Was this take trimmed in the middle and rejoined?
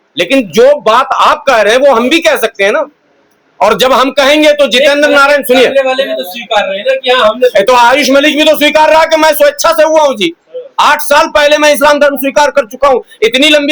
no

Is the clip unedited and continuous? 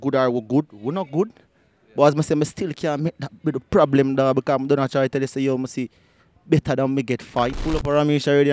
no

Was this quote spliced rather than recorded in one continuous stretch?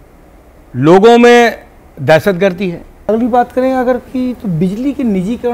yes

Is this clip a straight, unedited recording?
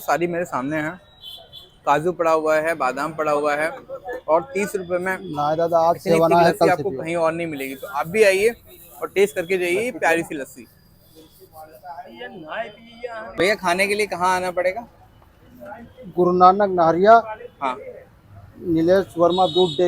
no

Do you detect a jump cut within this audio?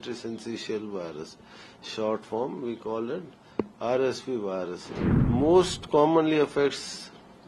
yes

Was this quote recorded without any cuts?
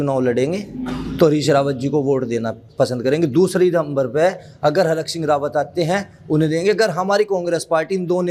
yes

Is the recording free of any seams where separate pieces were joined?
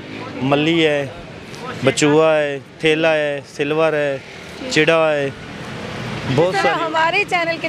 no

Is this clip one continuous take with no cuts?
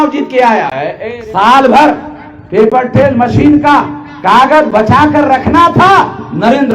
no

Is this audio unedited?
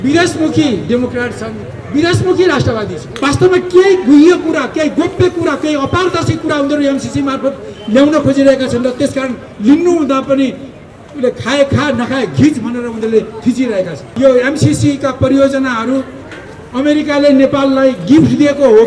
no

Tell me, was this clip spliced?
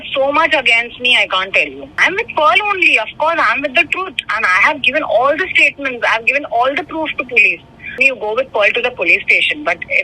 yes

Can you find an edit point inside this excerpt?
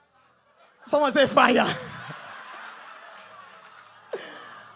no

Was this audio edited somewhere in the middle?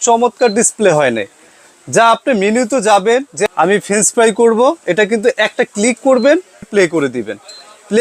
yes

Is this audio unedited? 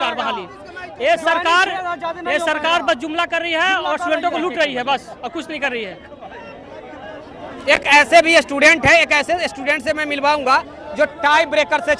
yes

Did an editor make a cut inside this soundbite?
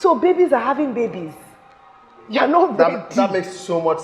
no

